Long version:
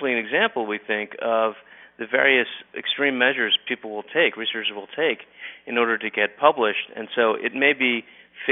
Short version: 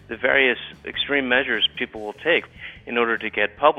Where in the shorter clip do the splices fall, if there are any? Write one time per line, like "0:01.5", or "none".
0:02.6